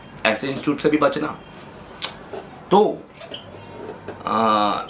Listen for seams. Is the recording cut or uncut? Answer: uncut